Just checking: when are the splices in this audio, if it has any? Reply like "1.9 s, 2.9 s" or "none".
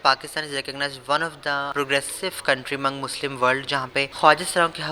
1.7 s, 4.1 s